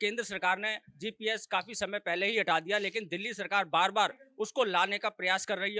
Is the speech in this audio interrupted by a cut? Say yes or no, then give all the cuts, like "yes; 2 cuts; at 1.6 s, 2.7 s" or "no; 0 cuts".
no; 0 cuts